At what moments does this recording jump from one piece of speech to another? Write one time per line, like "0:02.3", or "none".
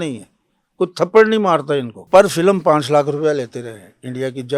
0:02.1